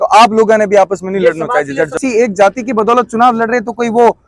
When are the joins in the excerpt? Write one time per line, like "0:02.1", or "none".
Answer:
0:01.9